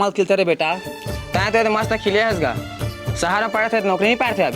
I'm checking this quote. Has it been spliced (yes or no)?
no